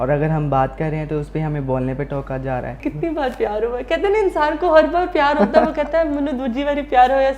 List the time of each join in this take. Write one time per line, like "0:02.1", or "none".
0:02.8